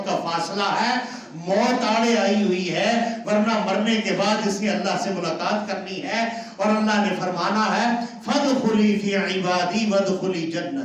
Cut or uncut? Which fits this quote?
uncut